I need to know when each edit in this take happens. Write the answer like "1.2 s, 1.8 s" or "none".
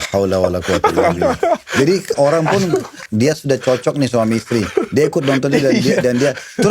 3.1 s